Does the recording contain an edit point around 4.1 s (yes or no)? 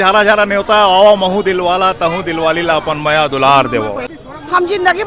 yes